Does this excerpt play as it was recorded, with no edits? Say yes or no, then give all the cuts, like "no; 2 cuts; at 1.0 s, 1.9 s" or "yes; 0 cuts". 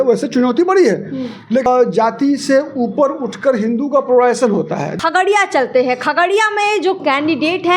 no; 2 cuts; at 1.7 s, 4.9 s